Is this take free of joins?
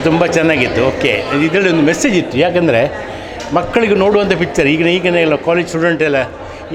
yes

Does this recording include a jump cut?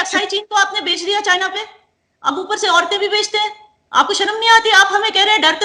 no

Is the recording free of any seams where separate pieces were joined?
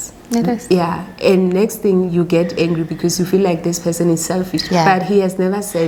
yes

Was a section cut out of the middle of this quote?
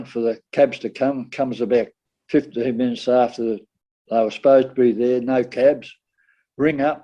no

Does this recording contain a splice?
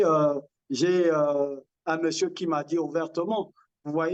no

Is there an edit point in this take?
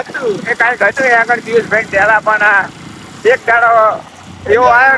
no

